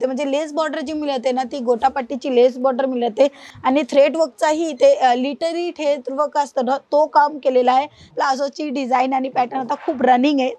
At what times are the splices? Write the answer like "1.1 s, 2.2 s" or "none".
3.5 s, 8.1 s

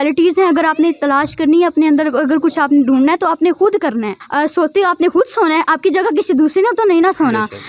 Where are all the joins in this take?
4.2 s

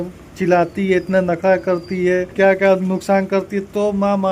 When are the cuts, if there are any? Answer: 2.3 s

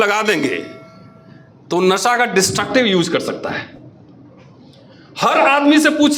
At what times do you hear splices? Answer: none

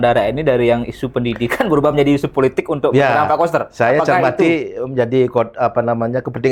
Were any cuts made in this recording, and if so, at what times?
none

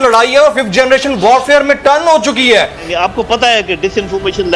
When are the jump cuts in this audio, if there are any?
2.9 s

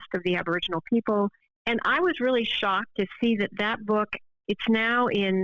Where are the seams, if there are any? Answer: 1.5 s, 2.9 s, 4.2 s

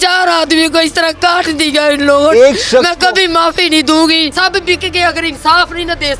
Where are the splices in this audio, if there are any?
4.3 s

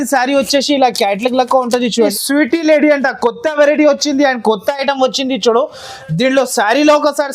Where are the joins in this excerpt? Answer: 2.1 s

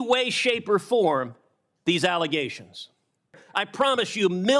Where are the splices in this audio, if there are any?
3.4 s

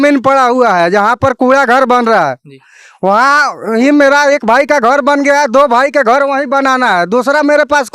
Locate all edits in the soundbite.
none

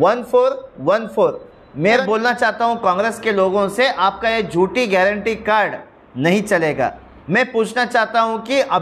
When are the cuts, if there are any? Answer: 2.0 s, 7.1 s

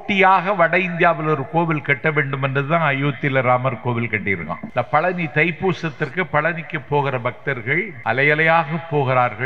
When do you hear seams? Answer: 4.6 s, 7.9 s

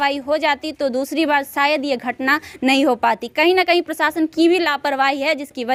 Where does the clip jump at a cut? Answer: none

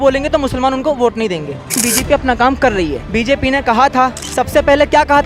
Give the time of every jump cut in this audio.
1.8 s, 3.0 s, 4.2 s

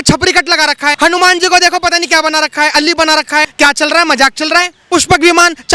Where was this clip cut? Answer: 1.0 s, 3.5 s, 4.8 s

